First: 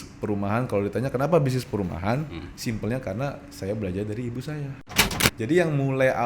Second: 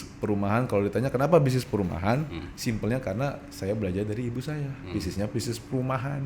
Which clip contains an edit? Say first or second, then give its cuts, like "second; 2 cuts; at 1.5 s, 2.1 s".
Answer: first; 1 cut; at 5.0 s